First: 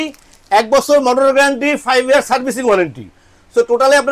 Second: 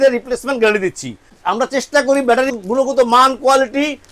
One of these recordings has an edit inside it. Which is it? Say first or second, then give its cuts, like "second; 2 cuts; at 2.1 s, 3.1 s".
second; 2 cuts; at 1.4 s, 2.5 s